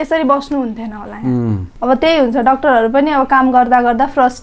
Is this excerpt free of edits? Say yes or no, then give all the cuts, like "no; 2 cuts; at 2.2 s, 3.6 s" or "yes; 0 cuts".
no; 1 cut; at 1.7 s